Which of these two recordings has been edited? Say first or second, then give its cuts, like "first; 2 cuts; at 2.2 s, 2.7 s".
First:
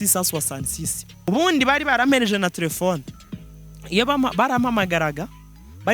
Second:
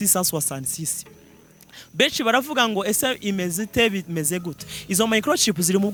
first; 1 cut; at 1.3 s